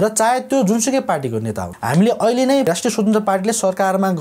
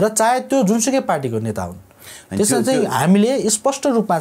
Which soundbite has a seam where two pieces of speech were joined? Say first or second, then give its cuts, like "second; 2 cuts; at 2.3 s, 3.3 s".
first; 1 cut; at 1.8 s